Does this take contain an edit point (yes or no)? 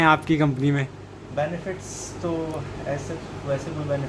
no